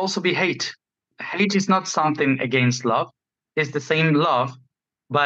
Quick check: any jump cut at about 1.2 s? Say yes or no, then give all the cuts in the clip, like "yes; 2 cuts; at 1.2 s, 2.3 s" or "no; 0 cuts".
yes; 1 cut; at 1.2 s